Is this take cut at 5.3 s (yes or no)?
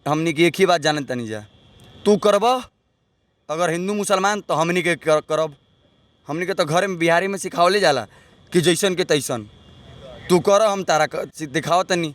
no